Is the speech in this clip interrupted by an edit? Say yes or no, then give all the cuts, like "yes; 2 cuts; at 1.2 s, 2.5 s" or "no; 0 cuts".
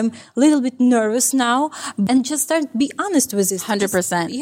yes; 1 cut; at 2.0 s